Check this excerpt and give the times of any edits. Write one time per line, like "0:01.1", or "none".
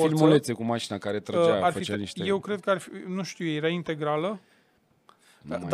none